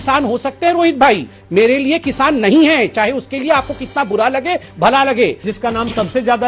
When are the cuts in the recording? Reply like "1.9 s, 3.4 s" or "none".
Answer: 5.5 s